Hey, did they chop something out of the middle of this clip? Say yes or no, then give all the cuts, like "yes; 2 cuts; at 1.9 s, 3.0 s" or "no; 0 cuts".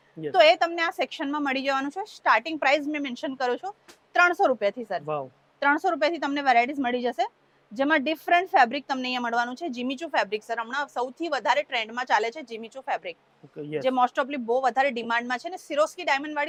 no; 0 cuts